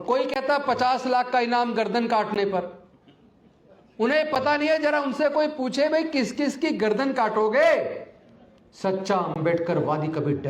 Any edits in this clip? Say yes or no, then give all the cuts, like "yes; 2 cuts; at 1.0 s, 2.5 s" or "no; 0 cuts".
no; 0 cuts